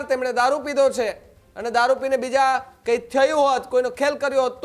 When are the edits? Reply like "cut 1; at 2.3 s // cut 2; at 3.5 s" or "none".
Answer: none